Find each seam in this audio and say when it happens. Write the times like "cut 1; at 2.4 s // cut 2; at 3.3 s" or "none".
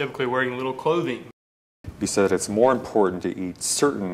cut 1; at 1.6 s